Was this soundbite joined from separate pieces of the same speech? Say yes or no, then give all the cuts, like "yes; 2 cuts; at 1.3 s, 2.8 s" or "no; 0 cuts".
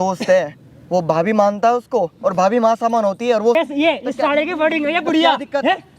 yes; 1 cut; at 3.5 s